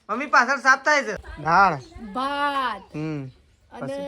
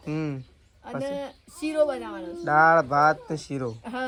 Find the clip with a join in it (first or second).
first